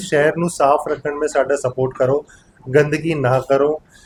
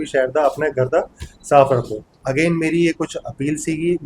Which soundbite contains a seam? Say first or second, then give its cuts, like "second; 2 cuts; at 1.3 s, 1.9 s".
second; 1 cut; at 2.2 s